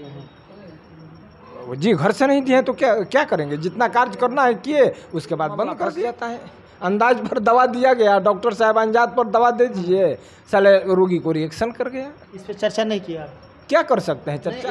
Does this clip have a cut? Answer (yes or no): yes